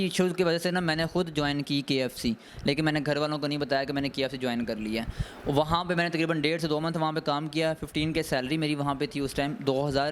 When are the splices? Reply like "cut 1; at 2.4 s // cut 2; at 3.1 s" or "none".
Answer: none